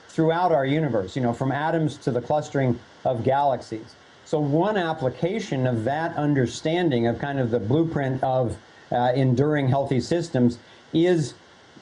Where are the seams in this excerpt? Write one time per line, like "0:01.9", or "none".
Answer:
0:10.3